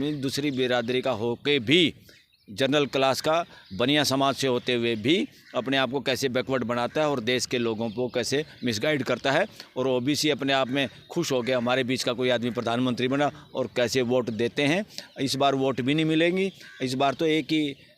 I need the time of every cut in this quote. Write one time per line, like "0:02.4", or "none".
none